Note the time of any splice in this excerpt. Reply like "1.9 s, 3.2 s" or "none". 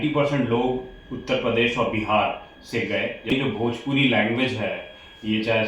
3.3 s